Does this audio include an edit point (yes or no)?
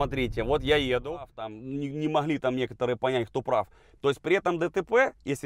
yes